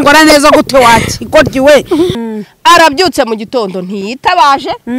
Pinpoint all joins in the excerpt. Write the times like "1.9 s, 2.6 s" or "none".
2.2 s